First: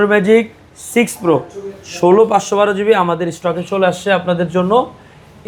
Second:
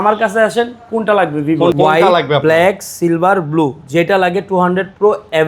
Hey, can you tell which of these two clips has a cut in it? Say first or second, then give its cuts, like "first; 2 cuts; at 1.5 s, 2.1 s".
second; 1 cut; at 1.7 s